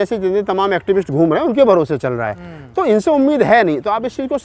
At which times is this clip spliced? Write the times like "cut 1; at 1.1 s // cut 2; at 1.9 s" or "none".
none